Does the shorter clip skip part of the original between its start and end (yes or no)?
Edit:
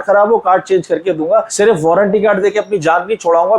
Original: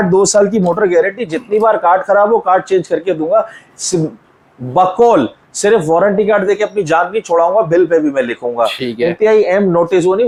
yes